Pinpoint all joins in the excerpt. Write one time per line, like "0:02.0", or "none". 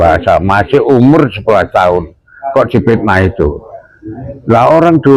none

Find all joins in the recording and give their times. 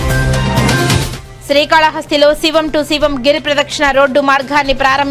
0:01.1

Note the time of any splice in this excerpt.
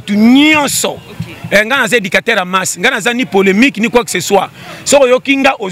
none

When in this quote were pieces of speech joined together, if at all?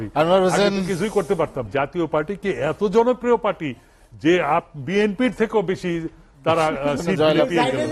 0:01.7

